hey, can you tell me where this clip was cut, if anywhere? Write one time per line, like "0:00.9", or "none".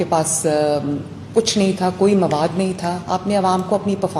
none